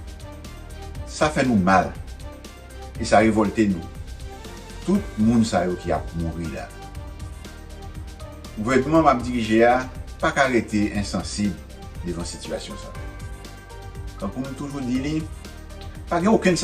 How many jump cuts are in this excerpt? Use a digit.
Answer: 3